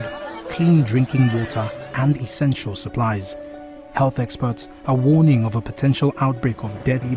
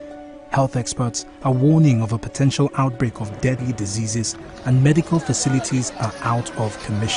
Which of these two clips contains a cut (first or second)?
second